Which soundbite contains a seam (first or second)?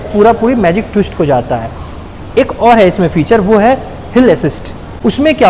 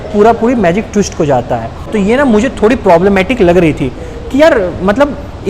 second